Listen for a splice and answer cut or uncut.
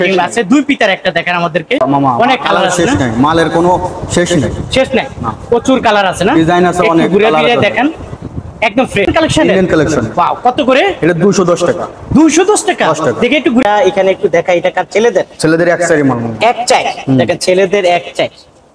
cut